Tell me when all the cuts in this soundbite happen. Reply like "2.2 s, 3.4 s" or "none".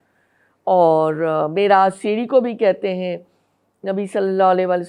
none